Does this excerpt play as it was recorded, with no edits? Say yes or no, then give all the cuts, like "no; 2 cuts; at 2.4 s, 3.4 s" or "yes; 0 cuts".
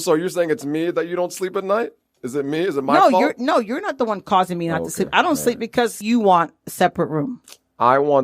no; 1 cut; at 6.0 s